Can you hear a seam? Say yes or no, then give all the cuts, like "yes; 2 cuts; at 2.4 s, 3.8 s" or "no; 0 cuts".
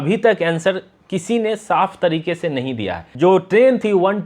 yes; 1 cut; at 3.1 s